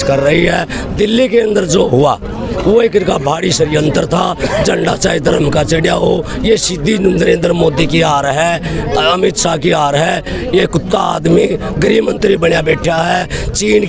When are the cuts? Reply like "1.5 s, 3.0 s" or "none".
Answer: none